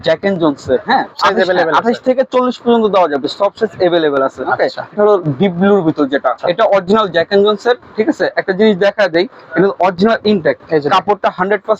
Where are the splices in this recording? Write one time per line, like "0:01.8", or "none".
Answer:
0:01.1
0:04.9
0:06.4
0:10.6